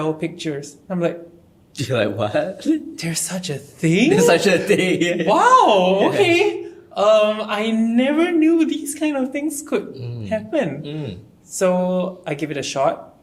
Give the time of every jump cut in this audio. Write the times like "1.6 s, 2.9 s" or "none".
none